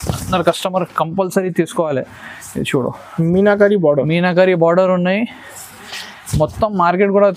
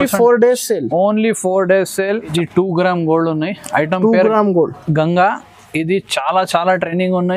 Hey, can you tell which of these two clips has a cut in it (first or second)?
second